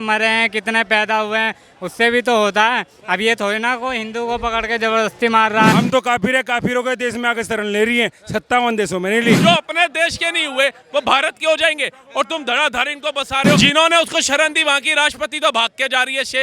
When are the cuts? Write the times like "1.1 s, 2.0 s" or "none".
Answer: 5.7 s, 9.4 s, 13.6 s